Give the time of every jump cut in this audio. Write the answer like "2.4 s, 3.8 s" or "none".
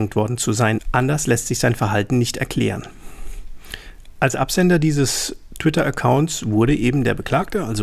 none